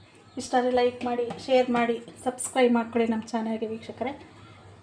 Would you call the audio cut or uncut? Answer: cut